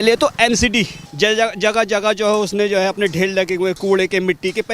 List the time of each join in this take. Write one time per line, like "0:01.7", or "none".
0:01.0